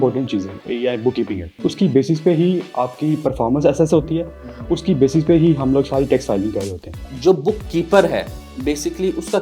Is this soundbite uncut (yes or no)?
no